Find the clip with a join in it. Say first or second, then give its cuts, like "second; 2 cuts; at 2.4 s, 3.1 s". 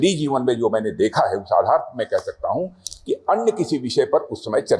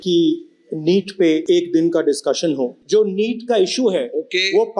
second; 2 cuts; at 1.4 s, 2.8 s